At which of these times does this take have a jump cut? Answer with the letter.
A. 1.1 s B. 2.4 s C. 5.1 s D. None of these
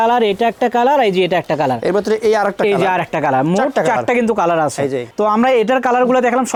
D